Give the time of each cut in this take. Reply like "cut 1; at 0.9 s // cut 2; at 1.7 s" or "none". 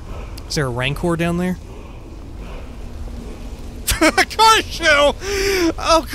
cut 1; at 3.8 s